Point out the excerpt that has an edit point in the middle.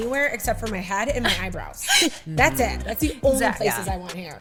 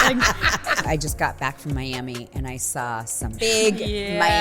second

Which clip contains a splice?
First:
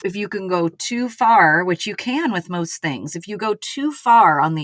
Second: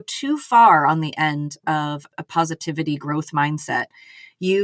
second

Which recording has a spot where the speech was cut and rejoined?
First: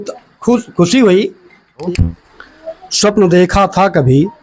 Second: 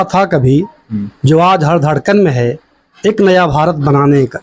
first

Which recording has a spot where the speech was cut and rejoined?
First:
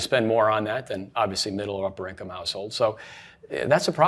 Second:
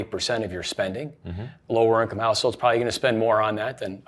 second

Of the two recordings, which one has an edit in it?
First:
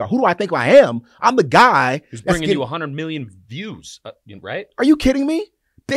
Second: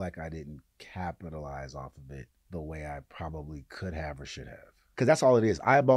second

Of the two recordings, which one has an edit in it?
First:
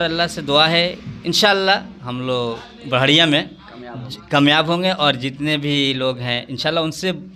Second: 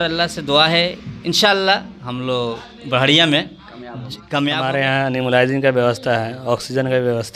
second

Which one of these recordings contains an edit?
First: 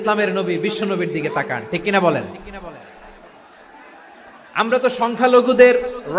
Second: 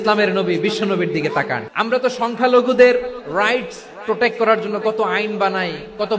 second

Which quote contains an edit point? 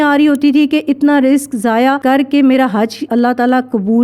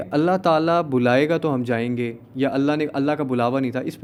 first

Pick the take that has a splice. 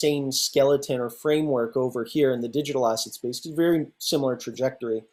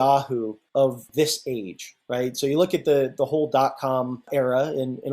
second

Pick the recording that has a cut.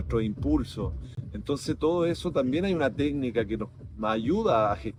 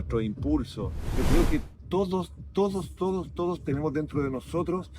second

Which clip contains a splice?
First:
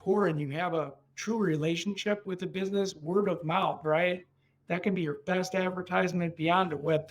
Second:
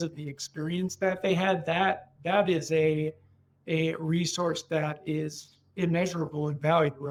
first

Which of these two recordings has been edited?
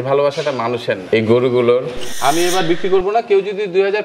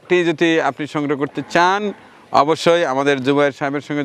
first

